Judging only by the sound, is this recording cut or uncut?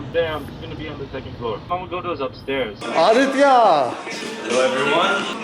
cut